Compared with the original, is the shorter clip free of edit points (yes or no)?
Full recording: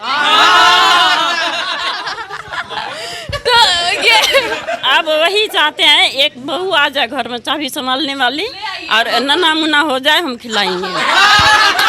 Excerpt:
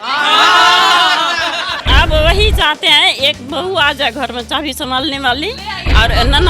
no